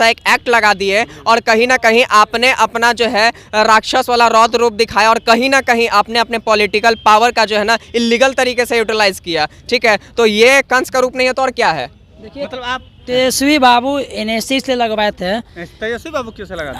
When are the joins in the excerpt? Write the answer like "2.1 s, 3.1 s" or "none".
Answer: none

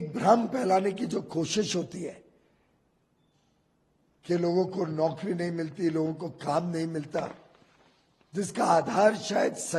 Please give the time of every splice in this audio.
none

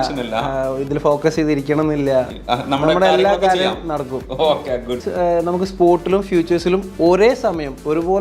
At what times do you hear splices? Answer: 5.1 s

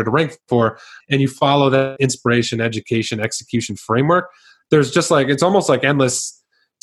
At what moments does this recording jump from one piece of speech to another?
0.9 s, 1.9 s

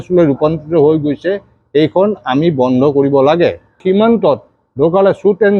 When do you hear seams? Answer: 3.8 s

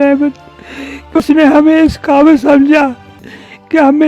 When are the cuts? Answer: 1.2 s

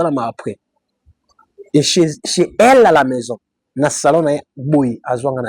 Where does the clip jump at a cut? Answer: none

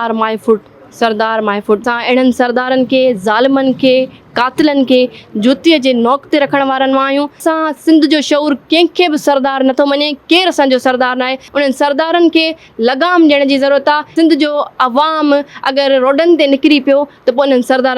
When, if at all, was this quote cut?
1.8 s, 7.4 s, 11.5 s, 14.1 s

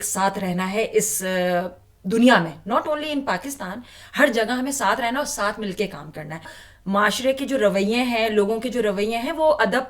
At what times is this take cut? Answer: 6.6 s

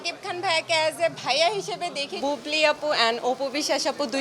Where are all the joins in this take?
2.2 s

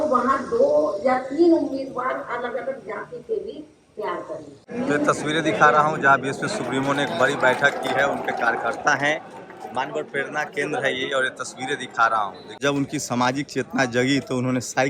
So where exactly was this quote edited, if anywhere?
4.6 s, 12.6 s

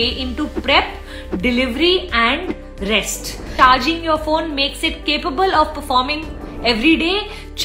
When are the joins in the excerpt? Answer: 3.5 s

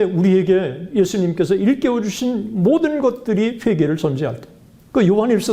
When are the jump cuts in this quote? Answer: none

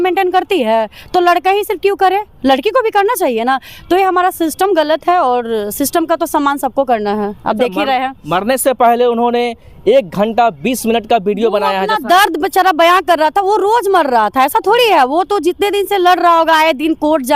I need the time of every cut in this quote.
none

